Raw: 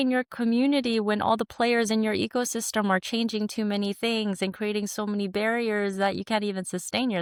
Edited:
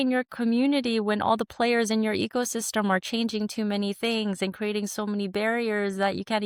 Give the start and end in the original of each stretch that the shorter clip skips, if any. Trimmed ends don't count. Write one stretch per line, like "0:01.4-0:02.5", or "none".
none